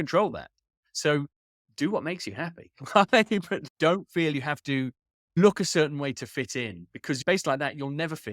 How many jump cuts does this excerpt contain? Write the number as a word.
two